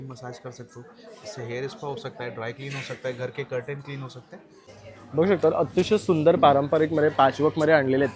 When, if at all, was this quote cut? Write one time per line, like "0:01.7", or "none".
0:04.6